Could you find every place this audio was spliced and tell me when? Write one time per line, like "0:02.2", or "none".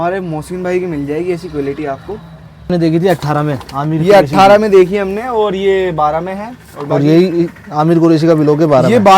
0:02.7